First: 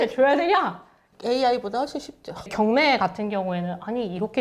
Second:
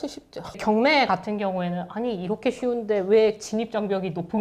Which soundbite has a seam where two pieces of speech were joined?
first; 1 cut; at 1.0 s

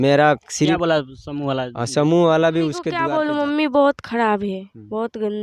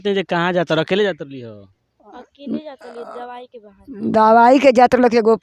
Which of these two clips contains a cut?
first; 1 cut; at 2.9 s

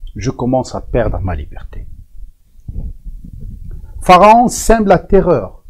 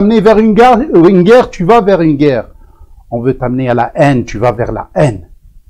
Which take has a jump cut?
first; 1 cut; at 3.9 s

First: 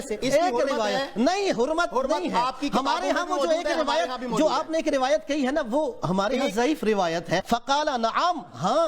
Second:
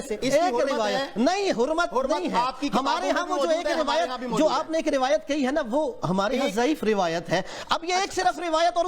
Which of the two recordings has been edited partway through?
first; 1 cut; at 7.4 s

